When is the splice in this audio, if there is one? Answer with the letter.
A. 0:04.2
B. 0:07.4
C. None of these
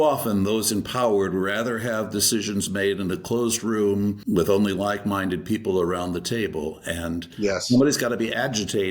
A